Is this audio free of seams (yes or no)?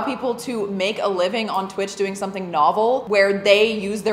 no